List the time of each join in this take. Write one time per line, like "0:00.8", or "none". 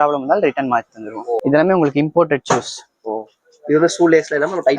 0:01.4

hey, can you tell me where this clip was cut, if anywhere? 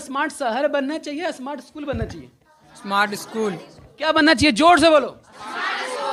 none

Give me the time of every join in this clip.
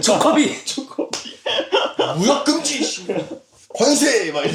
none

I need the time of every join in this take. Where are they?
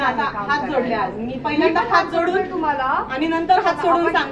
none

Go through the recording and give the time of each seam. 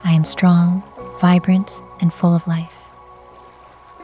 0:02.7

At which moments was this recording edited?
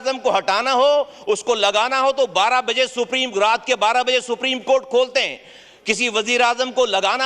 none

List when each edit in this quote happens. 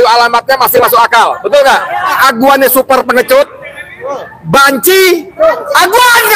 0:02.2

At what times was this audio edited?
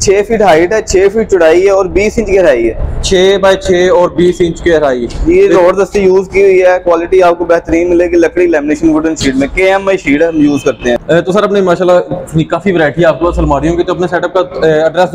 none

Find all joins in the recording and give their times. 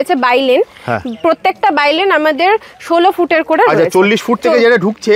none

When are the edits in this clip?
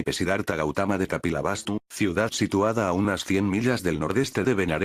none

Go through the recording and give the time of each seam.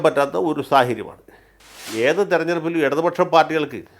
0:01.9

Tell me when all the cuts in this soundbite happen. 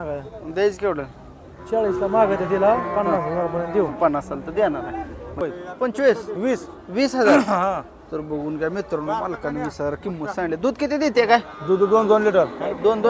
0:05.4

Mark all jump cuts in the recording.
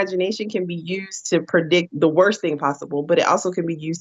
none

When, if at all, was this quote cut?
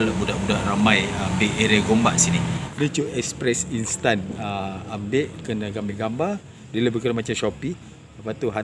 0:02.6

